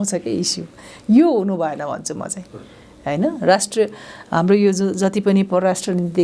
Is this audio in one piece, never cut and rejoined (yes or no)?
yes